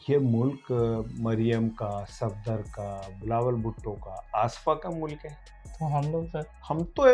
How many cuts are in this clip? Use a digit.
0